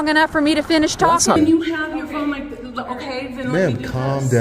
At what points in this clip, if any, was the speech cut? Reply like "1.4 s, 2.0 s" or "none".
1.4 s